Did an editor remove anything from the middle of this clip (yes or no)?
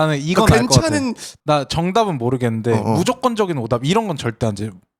yes